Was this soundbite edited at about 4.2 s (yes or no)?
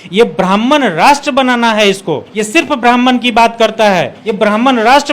yes